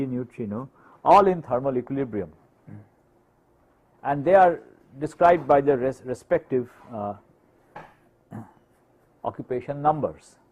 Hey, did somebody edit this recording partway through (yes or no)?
yes